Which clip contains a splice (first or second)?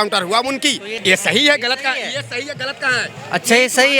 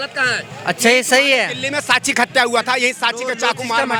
first